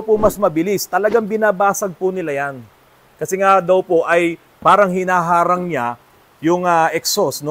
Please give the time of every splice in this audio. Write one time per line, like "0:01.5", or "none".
0:03.0